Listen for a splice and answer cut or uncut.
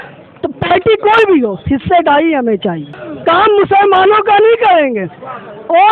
cut